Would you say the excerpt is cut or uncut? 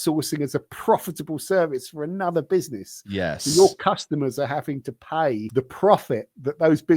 cut